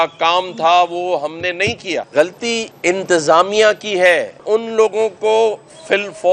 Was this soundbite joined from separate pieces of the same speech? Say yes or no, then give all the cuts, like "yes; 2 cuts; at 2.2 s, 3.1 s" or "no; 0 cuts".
yes; 3 cuts; at 2.1 s, 2.7 s, 4.4 s